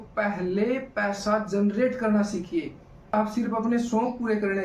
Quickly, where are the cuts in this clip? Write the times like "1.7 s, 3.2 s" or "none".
3.1 s

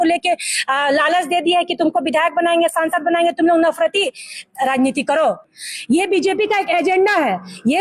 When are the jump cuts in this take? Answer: 5.6 s

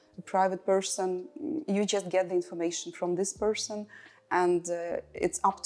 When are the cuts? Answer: none

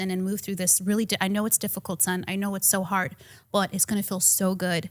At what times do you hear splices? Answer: none

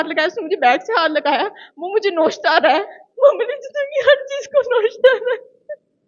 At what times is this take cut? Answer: none

